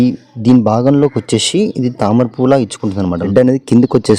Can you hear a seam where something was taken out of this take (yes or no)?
yes